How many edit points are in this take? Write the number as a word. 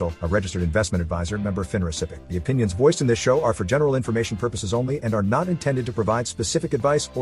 one